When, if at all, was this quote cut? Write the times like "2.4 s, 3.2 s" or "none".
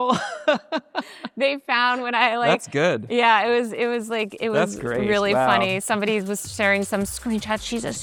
none